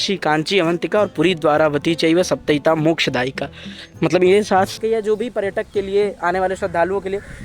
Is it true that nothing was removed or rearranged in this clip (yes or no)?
no